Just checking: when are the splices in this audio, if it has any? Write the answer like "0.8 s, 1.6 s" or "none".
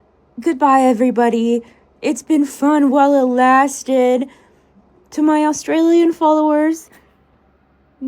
1.4 s